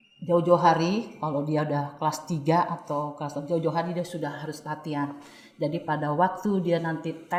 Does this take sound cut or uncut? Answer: uncut